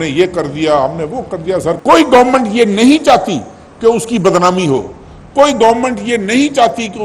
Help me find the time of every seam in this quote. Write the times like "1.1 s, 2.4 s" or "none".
1.8 s